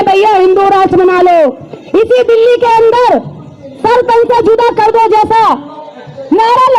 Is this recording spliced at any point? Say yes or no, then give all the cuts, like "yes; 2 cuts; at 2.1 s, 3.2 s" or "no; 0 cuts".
yes; 1 cut; at 1.7 s